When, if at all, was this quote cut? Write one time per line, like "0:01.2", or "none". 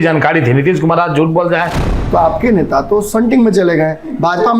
0:01.9